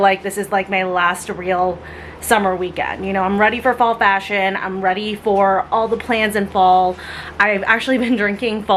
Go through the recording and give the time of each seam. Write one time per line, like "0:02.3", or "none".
none